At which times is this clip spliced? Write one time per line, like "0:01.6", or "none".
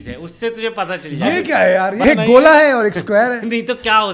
0:02.0

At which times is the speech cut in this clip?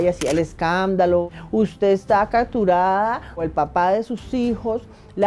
0:01.4

